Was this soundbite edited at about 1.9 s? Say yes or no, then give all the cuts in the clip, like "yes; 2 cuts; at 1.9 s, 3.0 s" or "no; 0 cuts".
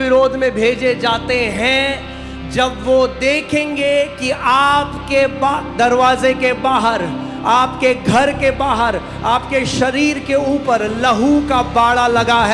no; 0 cuts